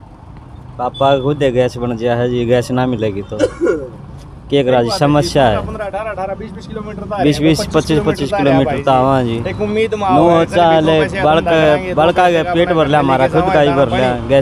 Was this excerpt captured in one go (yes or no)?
yes